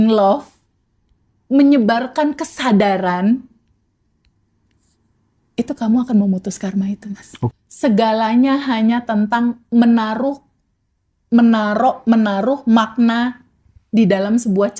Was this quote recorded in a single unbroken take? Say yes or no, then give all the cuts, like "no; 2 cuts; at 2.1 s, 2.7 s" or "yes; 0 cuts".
no; 1 cut; at 7.5 s